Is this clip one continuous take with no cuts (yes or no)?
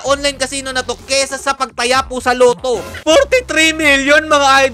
no